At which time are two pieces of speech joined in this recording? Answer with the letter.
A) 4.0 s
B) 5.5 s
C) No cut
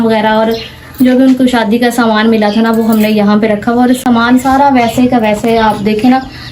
C